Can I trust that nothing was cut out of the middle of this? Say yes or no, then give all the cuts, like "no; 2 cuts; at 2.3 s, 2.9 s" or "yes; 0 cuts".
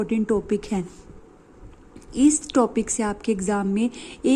yes; 0 cuts